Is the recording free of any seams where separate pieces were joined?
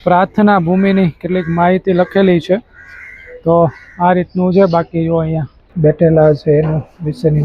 no; 1 cut; at 5.6 s

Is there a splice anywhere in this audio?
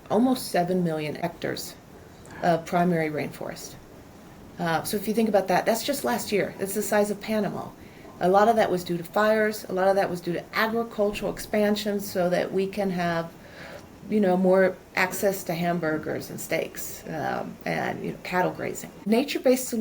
yes; 2 cuts; at 1.2 s, 19.0 s

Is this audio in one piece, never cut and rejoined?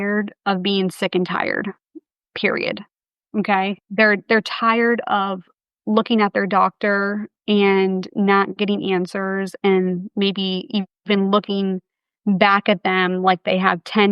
yes; 0 cuts

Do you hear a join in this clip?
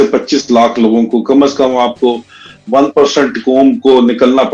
no; 0 cuts

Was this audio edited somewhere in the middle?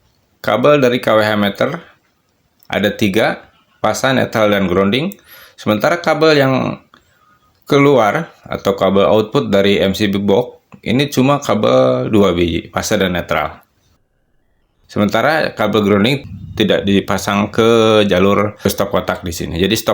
yes; 2 cuts; at 14.2 s, 16.2 s

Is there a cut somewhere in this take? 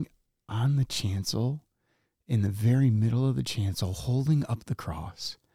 no; 0 cuts

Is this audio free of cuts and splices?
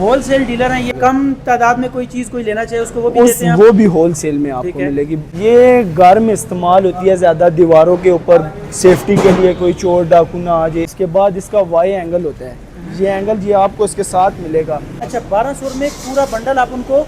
no; 4 cuts; at 1.0 s, 5.2 s, 10.9 s, 15.0 s

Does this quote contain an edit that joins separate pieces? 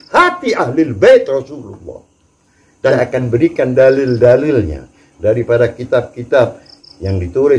yes; 1 cut; at 2.9 s

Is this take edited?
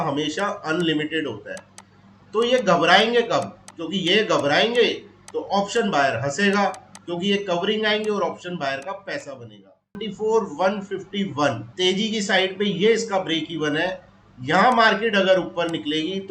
yes; 1 cut; at 10.0 s

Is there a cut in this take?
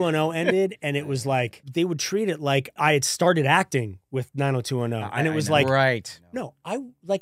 yes; 2 cuts; at 1.6 s, 2.7 s

